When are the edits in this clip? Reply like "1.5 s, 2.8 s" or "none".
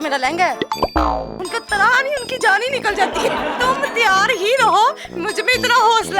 1.4 s, 3.6 s